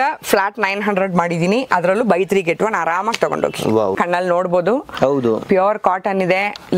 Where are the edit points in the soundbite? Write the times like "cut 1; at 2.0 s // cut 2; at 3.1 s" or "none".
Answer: cut 1; at 4.0 s